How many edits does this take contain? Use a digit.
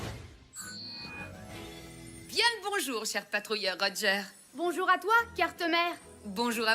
1